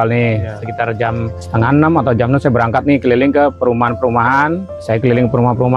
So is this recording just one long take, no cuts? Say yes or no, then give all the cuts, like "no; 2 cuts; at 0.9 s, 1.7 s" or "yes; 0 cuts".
no; 2 cuts; at 1.4 s, 4.7 s